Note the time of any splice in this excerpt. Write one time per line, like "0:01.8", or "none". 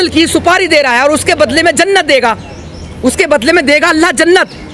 none